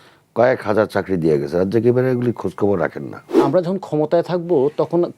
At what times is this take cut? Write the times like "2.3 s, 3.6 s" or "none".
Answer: 3.4 s